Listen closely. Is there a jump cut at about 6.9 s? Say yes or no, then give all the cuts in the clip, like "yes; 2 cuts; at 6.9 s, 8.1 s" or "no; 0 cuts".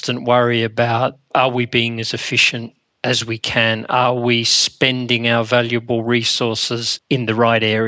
yes; 1 cut; at 6.9 s